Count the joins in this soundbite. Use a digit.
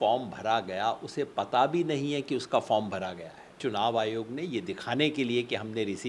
1